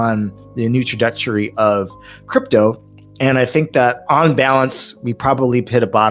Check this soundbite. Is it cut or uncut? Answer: uncut